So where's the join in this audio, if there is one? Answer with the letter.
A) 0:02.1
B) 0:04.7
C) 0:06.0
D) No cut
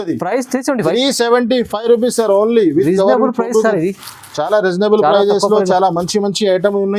D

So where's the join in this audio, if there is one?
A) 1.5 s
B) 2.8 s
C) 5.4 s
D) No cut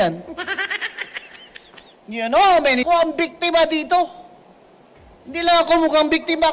B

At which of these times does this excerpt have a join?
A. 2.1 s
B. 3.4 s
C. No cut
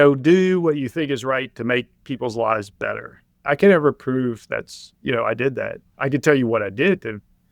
B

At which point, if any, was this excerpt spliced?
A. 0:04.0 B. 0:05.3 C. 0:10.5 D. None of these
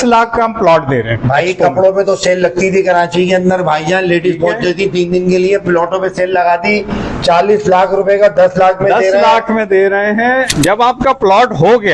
C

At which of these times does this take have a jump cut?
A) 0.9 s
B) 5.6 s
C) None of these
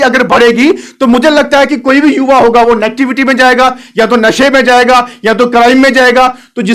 C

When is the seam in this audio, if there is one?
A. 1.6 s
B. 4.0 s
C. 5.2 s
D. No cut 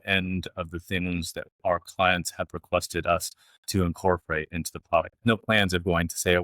C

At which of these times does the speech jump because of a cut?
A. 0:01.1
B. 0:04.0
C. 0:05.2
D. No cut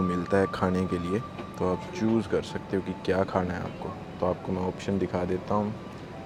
D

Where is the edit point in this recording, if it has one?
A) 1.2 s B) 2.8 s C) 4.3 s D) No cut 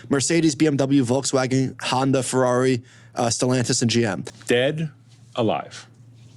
C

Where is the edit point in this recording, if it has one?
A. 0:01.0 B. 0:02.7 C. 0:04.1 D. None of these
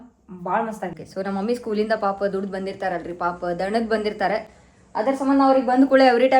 A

